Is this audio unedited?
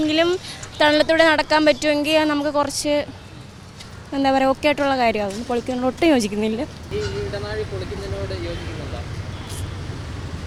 yes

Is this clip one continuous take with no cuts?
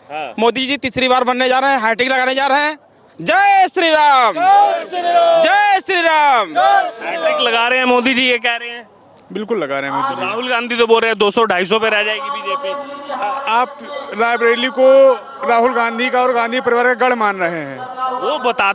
yes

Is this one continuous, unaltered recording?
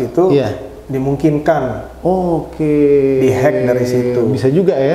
yes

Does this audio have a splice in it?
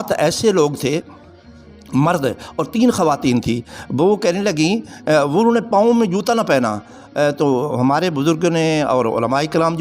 no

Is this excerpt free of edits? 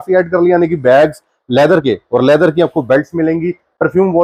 yes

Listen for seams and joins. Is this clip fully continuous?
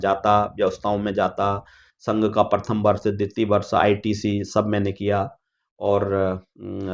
yes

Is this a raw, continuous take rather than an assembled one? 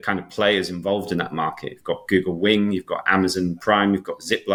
yes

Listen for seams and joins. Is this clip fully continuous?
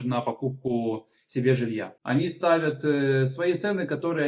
no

